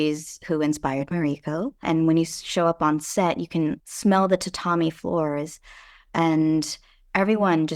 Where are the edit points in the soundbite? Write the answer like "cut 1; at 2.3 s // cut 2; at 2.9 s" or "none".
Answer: cut 1; at 1.8 s // cut 2; at 3.9 s